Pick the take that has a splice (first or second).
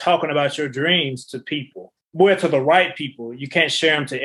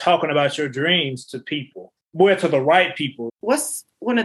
second